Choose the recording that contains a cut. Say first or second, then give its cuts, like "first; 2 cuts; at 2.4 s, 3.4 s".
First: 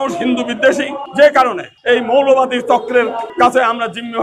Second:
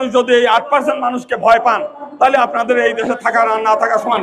first; 3 cuts; at 1.0 s, 1.7 s, 3.3 s